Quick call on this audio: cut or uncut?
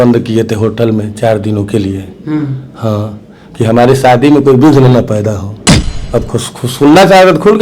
cut